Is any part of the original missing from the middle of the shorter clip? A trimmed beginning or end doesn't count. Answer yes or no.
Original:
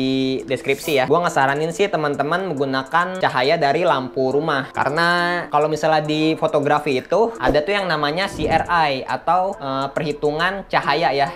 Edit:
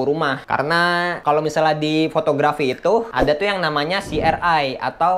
no